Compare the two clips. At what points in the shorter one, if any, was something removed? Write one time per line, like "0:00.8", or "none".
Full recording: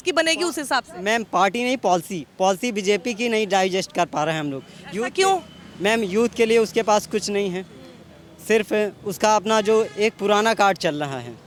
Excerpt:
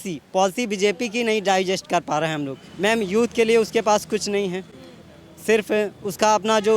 0:02.6